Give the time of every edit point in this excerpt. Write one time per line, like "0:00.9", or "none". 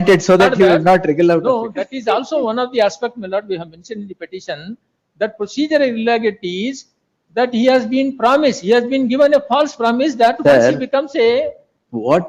none